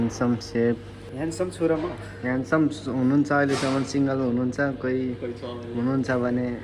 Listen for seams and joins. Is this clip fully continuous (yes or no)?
no